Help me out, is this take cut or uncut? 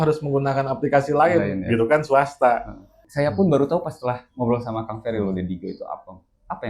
cut